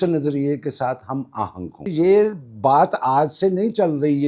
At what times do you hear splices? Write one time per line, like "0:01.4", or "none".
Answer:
0:01.8